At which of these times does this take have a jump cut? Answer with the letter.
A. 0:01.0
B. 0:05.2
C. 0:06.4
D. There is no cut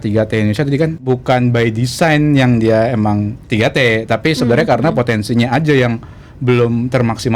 A